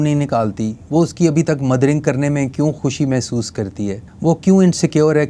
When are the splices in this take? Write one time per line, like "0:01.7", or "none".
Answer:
0:02.8
0:04.1